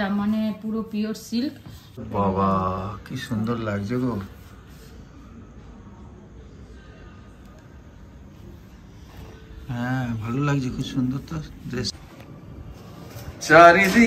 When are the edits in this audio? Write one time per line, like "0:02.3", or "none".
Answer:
0:02.0
0:11.9